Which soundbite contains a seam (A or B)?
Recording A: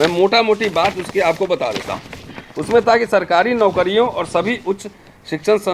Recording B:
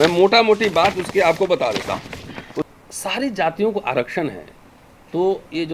B